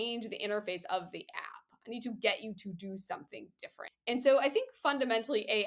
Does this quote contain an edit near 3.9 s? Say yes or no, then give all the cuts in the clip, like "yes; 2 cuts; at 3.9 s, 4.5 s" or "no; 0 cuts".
yes; 1 cut; at 3.9 s